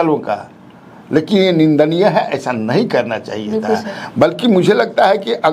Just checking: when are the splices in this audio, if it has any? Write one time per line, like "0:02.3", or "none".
none